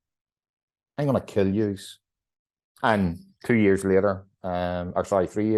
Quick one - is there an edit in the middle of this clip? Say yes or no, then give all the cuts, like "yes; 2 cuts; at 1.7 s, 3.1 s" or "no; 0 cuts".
no; 0 cuts